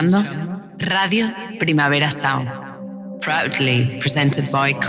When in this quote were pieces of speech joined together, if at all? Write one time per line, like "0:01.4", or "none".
none